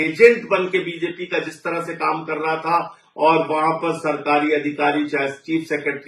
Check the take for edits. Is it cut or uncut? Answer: uncut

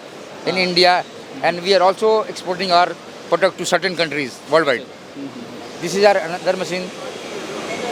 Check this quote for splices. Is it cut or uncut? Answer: uncut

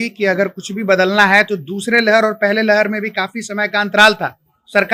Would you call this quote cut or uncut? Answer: uncut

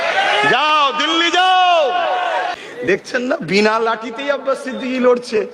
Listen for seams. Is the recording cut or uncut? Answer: cut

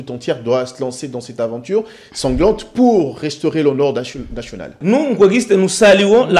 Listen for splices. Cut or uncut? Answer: cut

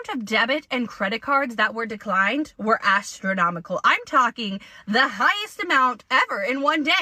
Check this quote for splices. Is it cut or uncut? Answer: uncut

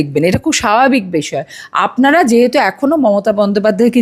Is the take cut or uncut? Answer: uncut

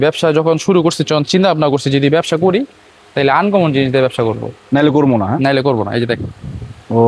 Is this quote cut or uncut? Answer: uncut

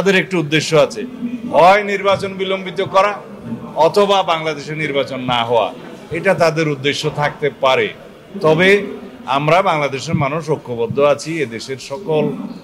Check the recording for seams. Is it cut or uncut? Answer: uncut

